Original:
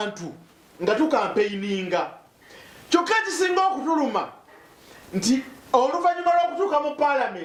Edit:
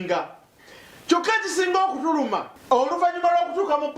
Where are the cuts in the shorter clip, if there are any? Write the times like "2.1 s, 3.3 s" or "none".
2.5 s